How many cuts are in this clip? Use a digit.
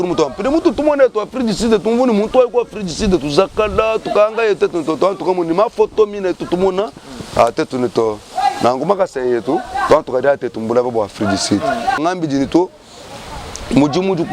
1